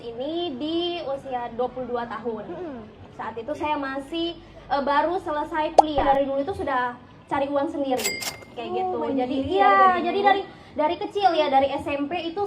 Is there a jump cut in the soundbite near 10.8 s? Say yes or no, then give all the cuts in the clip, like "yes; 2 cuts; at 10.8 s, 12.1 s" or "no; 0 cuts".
no; 1 cut; at 6.0 s